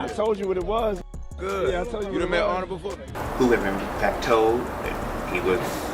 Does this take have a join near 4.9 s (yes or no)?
no